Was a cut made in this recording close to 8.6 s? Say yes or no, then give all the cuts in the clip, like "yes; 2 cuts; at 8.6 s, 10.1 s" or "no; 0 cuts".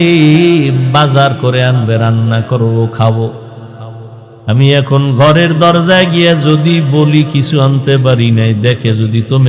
no; 0 cuts